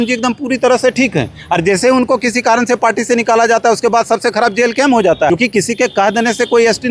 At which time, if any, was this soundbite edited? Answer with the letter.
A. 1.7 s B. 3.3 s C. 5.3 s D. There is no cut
C